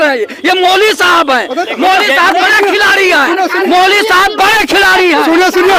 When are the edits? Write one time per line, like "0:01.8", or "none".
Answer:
none